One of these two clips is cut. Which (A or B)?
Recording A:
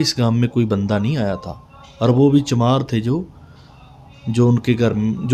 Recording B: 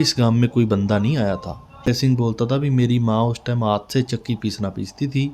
B